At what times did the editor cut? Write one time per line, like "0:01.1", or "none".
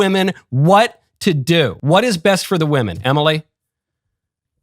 0:01.8